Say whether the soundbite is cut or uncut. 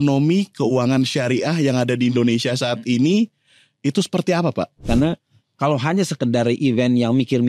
cut